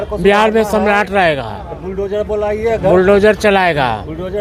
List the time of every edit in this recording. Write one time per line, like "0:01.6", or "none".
none